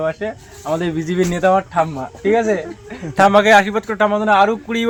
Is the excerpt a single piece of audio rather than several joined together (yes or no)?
yes